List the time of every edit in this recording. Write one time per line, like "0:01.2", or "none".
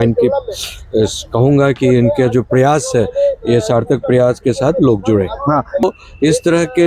0:05.8